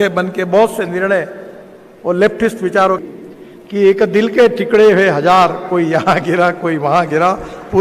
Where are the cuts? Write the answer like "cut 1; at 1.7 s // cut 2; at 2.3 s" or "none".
cut 1; at 3.0 s